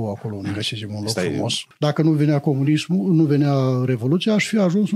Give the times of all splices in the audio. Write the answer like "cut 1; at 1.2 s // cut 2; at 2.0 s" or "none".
cut 1; at 1.6 s

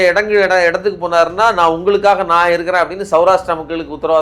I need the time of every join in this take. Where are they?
none

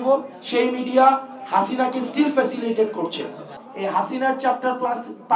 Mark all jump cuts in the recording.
cut 1; at 3.6 s

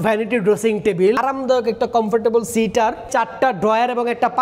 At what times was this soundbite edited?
cut 1; at 1.2 s // cut 2; at 3.0 s

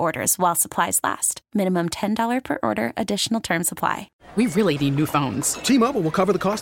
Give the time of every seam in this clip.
cut 1; at 4.1 s

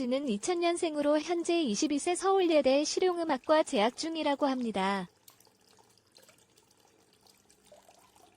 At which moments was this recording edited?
cut 1; at 5.1 s

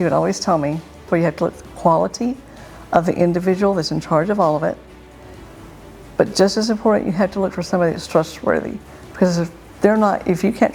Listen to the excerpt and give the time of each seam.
none

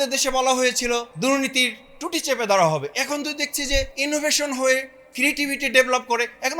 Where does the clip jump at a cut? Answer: cut 1; at 1.1 s // cut 2; at 3.9 s

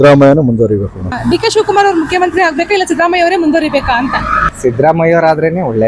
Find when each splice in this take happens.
cut 1; at 1.2 s // cut 2; at 4.4 s

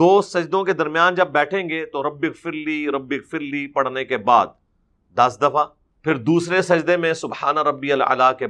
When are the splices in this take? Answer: cut 1; at 5.9 s

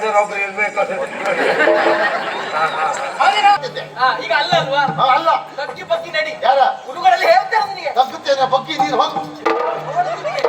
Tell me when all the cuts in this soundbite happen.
cut 1; at 3.7 s

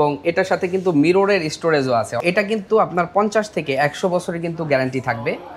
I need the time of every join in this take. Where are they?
cut 1; at 2.2 s

